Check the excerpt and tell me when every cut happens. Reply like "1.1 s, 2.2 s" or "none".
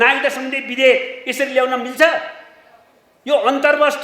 none